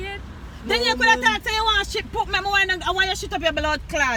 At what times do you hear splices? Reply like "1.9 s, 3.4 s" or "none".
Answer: none